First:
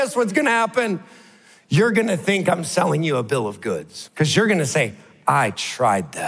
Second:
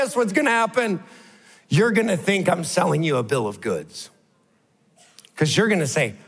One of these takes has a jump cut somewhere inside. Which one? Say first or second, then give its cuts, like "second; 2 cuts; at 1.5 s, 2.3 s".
first; 1 cut; at 4.0 s